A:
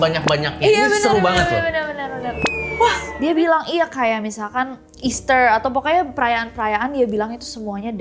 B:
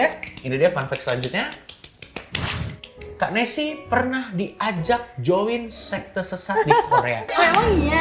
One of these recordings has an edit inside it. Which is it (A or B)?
A